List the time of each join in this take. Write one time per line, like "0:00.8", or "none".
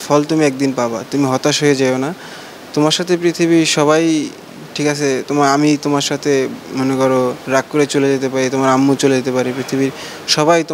none